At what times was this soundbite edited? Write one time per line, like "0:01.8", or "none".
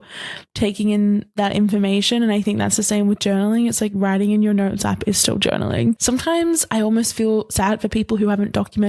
0:06.0

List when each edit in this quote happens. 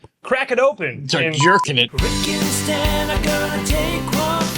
0:01.9

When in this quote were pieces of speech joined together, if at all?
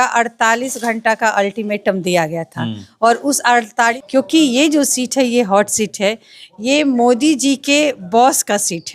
0:04.0

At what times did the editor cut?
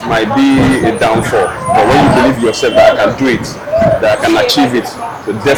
none

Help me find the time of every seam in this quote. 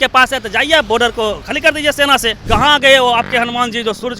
0:02.3

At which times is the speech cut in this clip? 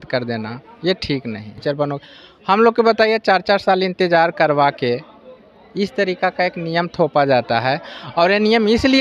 0:02.0

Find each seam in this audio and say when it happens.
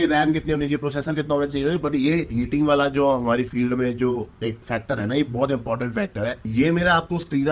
0:06.4

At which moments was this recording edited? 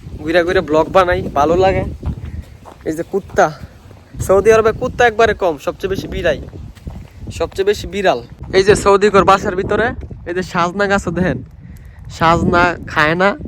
0:08.3

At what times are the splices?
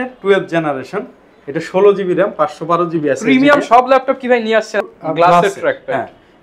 0:04.8

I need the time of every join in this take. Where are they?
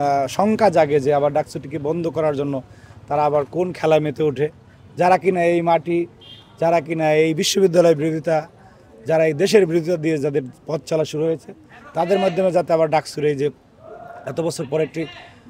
none

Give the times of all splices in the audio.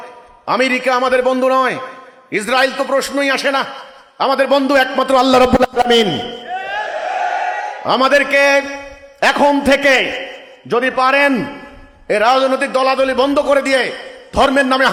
none

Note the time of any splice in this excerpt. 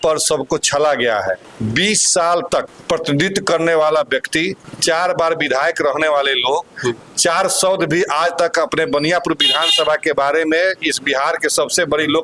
0:01.5
0:02.7
0:04.6

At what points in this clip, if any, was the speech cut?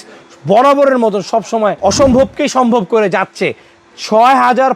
0:01.8

